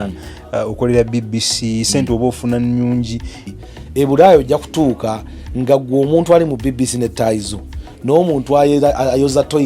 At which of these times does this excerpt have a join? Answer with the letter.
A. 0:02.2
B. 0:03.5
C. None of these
B